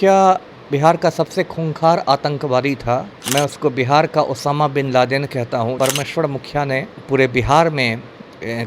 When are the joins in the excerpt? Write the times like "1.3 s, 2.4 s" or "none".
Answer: 3.2 s, 5.8 s